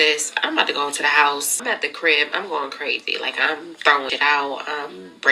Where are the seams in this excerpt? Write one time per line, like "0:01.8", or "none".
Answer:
0:01.6
0:04.1